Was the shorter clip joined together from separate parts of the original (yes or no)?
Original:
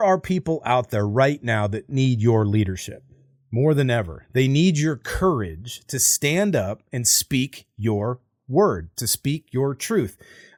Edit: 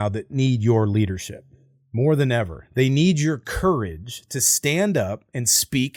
no